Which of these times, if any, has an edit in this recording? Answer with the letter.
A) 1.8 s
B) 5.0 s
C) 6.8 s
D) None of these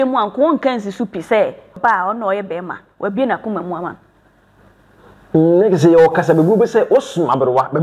A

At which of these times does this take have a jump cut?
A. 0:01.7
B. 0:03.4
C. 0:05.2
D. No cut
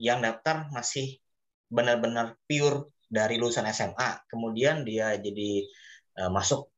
D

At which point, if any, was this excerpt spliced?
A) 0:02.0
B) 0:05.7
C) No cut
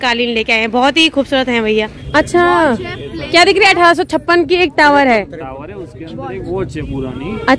A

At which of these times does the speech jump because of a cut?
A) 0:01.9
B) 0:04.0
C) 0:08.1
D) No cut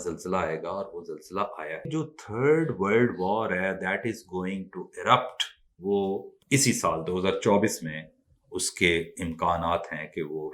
A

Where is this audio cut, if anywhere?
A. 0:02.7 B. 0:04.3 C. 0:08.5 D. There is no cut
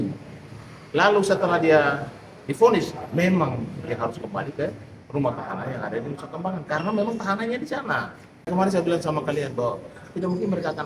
C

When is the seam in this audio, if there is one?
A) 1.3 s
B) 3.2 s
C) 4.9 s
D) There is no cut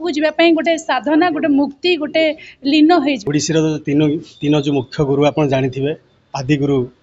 B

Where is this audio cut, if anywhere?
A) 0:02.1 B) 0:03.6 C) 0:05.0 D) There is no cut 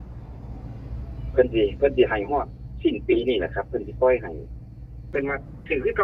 C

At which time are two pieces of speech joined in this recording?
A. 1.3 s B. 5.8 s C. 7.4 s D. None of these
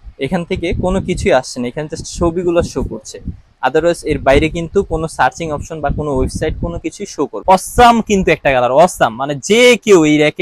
C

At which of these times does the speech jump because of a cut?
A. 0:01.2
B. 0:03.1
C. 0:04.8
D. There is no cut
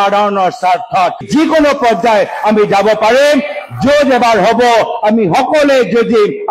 A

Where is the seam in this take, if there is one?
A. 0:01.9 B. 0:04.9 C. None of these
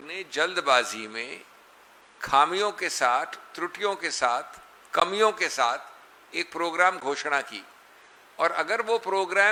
C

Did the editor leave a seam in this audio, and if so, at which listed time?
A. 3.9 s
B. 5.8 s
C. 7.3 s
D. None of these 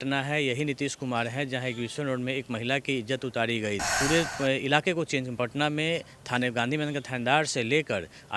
A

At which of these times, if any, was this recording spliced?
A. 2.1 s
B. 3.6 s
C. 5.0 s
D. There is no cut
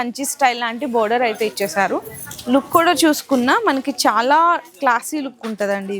D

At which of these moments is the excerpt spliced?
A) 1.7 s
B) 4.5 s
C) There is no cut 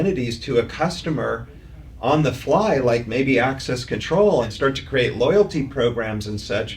B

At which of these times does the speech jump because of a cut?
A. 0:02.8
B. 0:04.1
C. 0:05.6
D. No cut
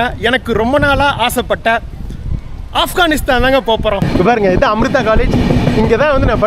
B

